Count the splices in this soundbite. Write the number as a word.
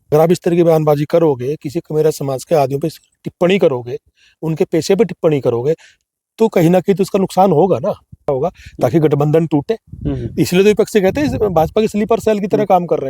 one